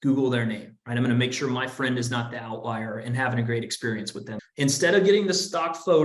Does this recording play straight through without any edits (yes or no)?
no